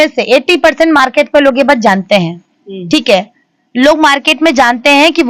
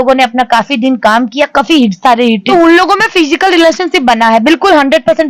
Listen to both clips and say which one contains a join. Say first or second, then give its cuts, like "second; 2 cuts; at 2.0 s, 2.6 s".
second; 1 cut; at 2.4 s